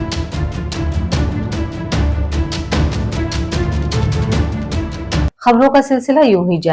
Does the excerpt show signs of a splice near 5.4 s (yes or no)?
yes